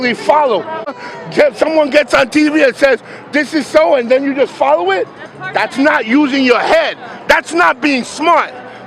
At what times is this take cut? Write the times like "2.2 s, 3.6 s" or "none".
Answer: 0.9 s

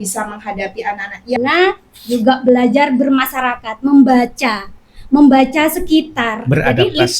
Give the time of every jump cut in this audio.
1.4 s

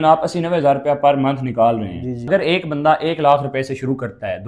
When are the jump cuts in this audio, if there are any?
2.3 s

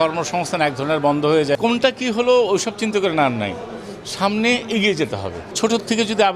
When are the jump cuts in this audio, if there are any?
1.5 s, 5.6 s

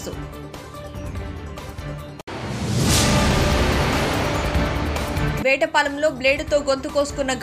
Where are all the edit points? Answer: none

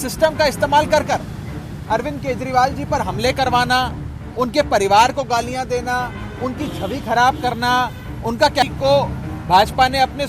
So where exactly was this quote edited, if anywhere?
8.6 s

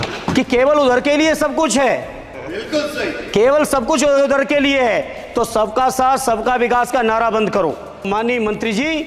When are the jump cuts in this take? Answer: 8.1 s

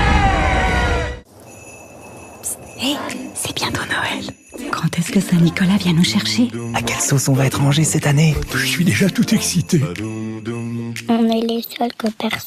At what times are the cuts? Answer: 1.1 s

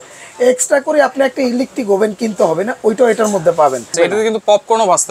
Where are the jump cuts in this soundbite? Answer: 3.9 s

